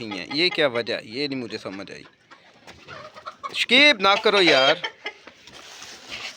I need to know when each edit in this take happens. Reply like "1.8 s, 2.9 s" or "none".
none